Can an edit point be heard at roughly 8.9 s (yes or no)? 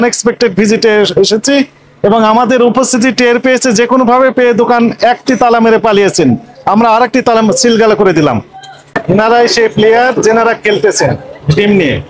yes